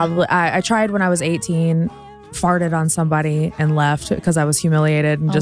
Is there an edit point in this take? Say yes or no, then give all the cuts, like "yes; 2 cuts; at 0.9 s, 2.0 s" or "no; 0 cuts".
no; 0 cuts